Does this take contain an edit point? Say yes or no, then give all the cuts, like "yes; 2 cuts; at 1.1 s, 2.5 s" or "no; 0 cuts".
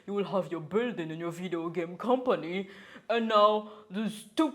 no; 0 cuts